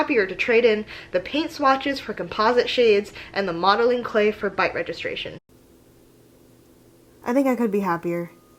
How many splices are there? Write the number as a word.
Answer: zero